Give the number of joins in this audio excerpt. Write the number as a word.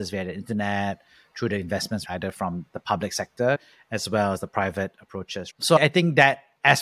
two